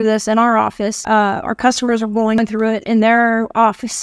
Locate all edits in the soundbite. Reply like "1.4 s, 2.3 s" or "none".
1.0 s, 2.4 s